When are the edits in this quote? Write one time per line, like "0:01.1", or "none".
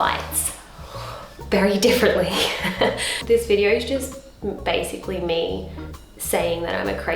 0:03.1

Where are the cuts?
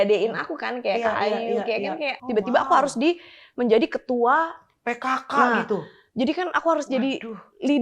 0:02.2

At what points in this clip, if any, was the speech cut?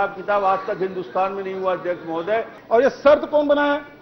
0:02.6

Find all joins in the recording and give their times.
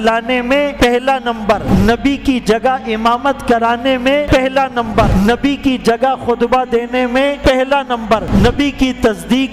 0:00.7
0:01.6
0:04.3
0:05.1
0:07.4
0:08.3

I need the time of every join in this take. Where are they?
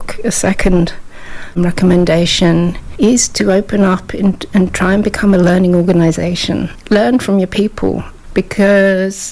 0:01.5
0:06.7
0:08.1

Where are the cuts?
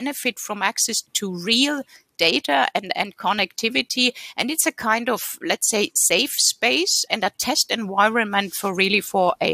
0:01.1
0:07.0

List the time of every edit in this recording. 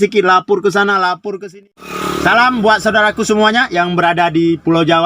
0:01.3

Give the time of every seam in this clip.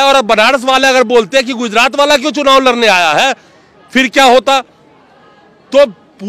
none

